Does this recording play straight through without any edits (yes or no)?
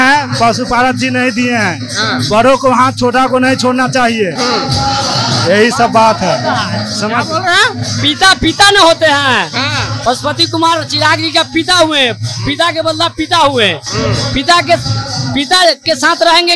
yes